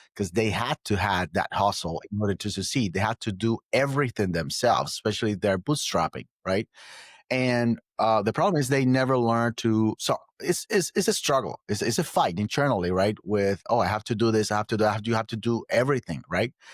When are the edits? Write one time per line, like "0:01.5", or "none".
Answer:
none